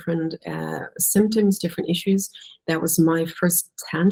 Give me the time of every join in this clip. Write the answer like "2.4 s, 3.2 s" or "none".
none